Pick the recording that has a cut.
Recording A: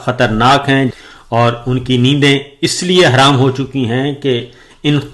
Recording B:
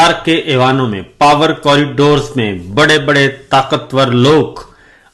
A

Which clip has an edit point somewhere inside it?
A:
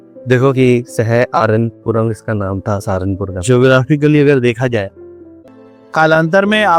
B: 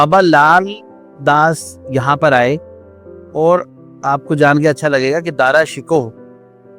A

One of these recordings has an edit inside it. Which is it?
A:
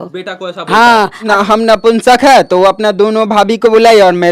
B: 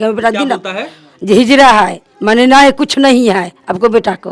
A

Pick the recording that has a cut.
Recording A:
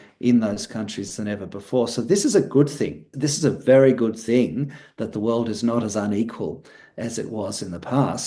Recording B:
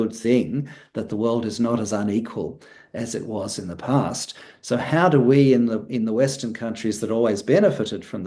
A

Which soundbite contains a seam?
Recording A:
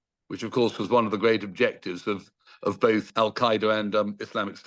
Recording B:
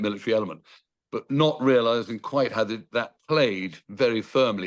A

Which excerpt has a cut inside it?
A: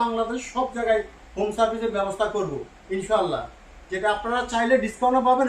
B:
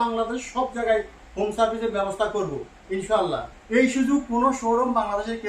B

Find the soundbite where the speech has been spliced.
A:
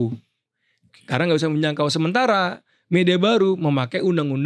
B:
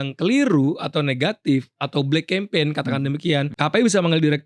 B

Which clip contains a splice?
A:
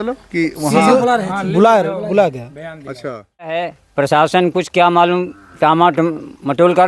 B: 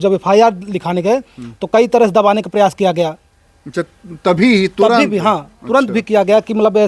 A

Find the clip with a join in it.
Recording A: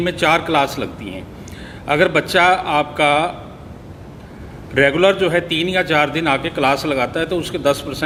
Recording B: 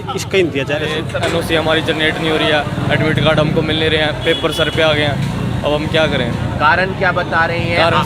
B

